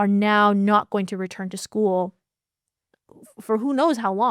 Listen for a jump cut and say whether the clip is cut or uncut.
uncut